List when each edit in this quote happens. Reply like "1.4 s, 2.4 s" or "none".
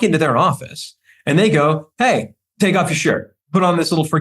2.4 s, 3.3 s